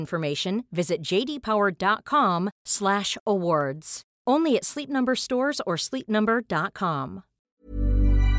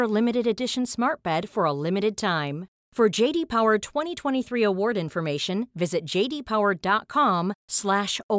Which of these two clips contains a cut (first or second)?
first